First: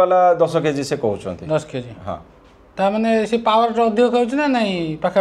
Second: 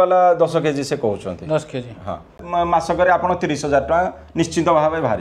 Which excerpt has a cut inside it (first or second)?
second